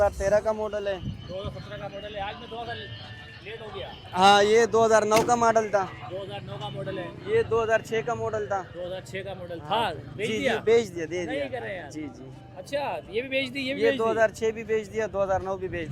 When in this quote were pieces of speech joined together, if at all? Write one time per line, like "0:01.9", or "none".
none